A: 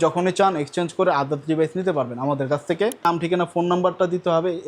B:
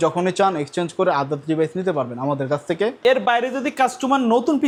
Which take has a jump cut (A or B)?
A